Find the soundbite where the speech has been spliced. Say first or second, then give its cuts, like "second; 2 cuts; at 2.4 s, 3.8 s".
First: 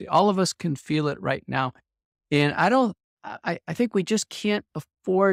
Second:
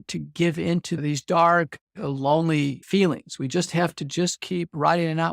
second; 2 cuts; at 1.0 s, 2.8 s